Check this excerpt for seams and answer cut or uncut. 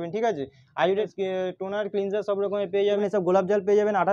cut